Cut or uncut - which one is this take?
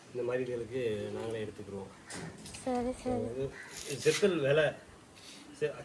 uncut